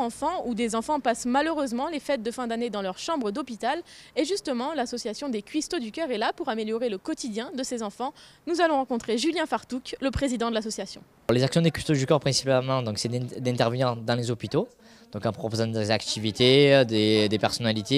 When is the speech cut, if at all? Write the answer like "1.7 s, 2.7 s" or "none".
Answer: 3.3 s